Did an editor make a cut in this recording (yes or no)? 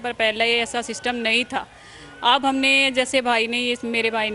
no